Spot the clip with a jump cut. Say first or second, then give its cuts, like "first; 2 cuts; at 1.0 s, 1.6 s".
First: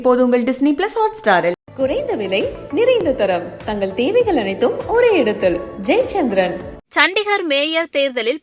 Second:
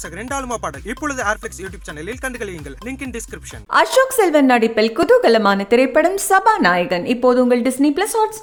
first; 1 cut; at 6.8 s